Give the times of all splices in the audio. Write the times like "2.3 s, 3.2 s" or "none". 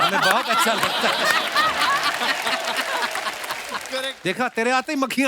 4.1 s